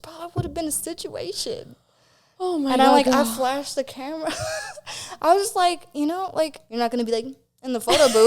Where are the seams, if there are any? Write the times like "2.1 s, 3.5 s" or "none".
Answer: 6.6 s